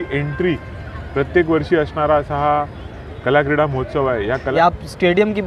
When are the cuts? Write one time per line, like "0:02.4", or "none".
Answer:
0:04.5